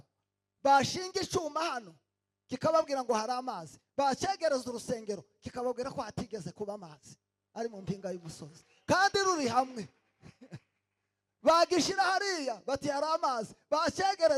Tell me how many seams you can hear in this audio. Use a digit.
0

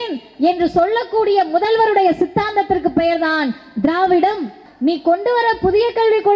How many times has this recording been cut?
1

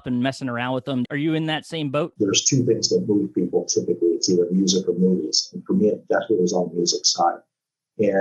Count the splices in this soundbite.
2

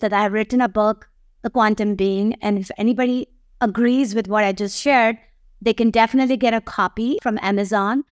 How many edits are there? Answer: 1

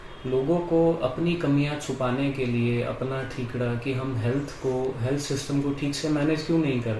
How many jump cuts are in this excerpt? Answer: 0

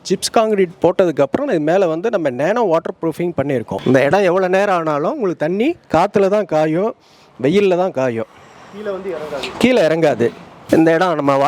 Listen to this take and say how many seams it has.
2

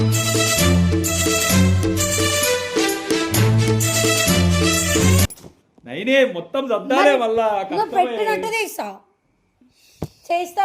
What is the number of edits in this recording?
1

